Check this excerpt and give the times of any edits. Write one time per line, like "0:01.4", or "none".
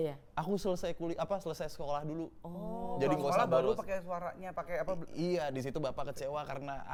none

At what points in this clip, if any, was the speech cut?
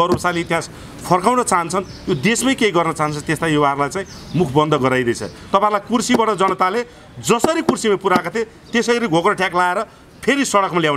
0:05.3

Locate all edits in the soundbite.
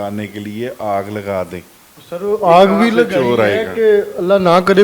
none

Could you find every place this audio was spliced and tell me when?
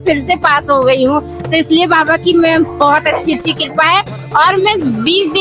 none

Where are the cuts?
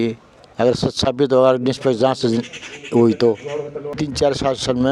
0:04.0

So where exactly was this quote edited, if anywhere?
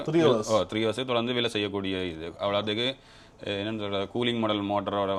none

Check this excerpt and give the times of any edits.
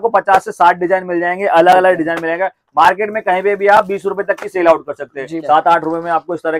0:05.3

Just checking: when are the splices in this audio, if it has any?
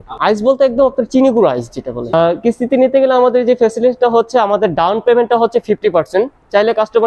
0:02.0

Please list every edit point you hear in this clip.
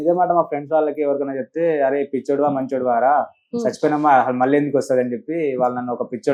none

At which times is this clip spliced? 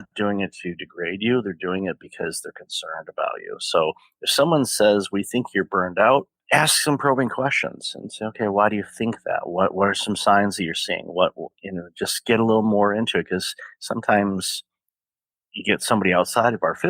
0:06.4

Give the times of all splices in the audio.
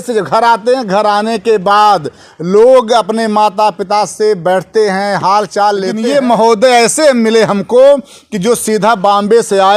0:05.9

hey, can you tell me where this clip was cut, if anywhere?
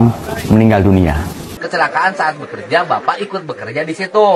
0:01.5

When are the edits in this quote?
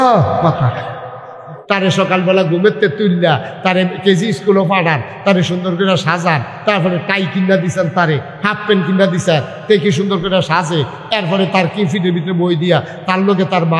0:01.6

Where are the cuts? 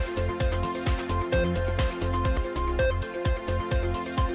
0:01.5

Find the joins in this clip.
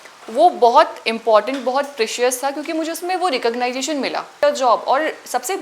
0:04.4

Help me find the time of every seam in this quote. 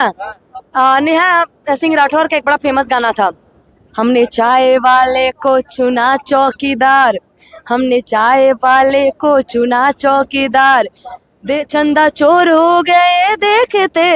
none

